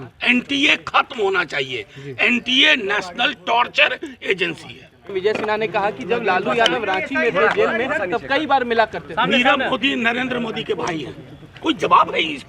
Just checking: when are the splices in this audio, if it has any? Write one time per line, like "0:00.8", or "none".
0:05.1

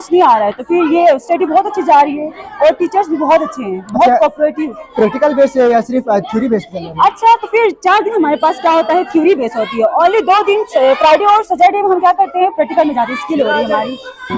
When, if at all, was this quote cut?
none

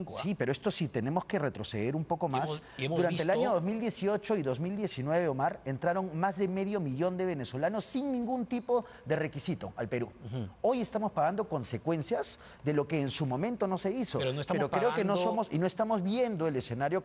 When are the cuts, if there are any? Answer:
none

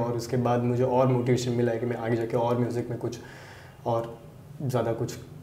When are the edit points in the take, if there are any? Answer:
none

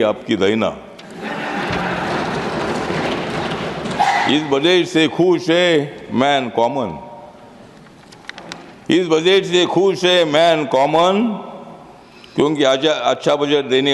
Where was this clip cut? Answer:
none

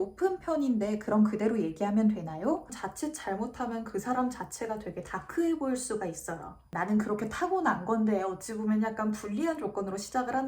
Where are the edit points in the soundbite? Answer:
0:02.8
0:06.6

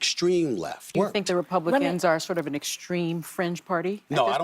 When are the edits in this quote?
0:00.9

